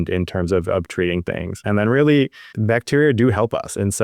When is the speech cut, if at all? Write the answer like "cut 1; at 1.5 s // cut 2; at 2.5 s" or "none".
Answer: cut 1; at 1.5 s